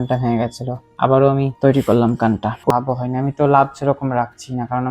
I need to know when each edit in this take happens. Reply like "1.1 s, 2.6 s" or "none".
2.7 s

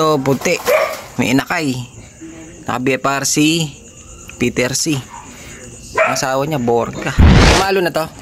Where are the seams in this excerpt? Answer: 7.3 s

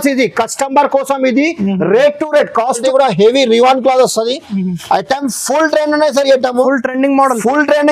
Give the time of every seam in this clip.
2.8 s

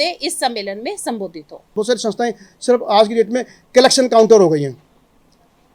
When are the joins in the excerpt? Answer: 1.7 s

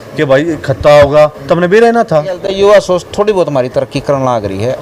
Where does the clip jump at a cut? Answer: 2.4 s

